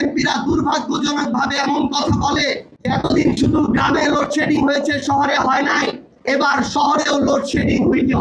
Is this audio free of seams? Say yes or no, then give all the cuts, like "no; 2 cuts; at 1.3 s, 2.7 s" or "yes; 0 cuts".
no; 2 cuts; at 2.7 s, 6.1 s